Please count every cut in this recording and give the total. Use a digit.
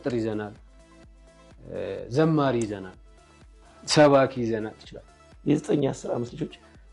1